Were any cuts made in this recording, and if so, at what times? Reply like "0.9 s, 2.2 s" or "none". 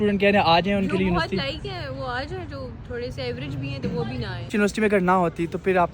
4.4 s